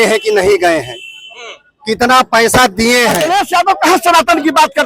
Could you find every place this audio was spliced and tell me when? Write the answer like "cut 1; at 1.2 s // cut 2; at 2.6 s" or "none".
cut 1; at 3.2 s